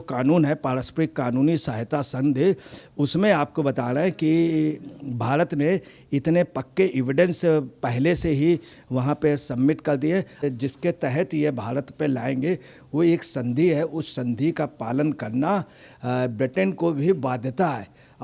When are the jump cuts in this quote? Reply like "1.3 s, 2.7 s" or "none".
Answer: 10.4 s